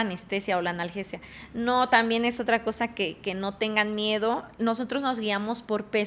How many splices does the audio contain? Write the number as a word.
zero